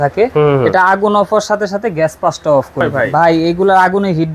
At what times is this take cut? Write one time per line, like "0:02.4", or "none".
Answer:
0:02.9